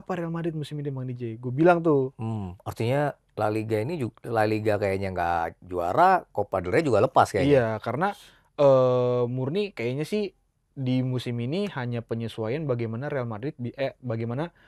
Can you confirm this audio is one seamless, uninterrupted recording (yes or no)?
yes